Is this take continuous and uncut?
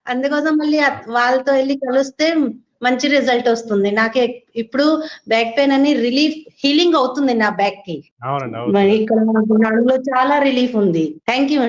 yes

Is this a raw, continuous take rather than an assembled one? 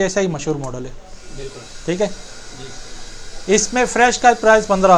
yes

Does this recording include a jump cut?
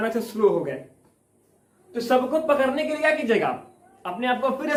no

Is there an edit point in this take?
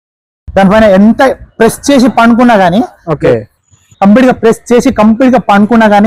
no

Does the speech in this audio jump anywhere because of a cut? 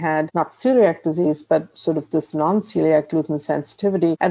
no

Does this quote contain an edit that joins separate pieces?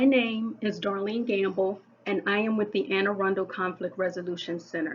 no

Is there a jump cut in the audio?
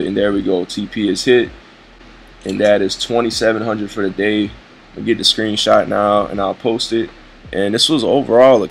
no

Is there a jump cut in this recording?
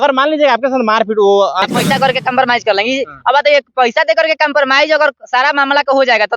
yes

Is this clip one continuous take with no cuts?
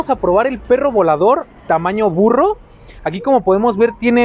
yes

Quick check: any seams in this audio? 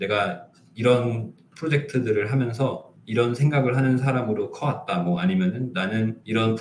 no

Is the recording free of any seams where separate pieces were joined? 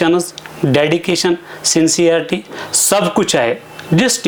yes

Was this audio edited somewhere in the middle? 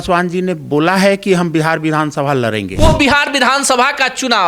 yes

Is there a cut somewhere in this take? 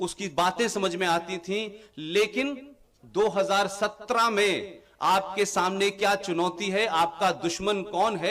no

